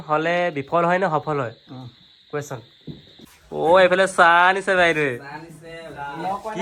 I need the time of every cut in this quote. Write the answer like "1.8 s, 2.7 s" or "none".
3.2 s